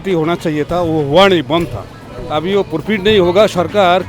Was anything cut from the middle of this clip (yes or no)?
yes